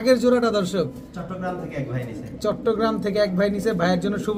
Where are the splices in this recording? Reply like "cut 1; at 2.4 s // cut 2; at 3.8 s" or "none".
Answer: none